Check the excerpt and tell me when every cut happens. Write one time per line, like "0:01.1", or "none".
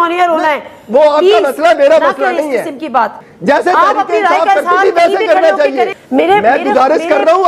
0:03.2
0:06.0